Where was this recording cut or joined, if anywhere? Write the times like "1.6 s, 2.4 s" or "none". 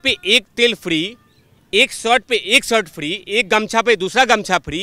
none